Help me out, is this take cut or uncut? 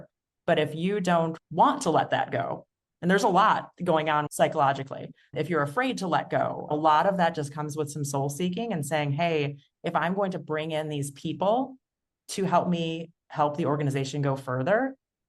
cut